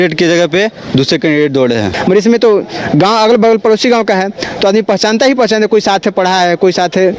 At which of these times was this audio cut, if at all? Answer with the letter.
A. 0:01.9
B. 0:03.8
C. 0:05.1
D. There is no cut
A